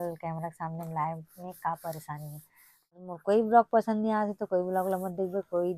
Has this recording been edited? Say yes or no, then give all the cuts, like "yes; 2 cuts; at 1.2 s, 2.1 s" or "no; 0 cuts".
yes; 1 cut; at 3.0 s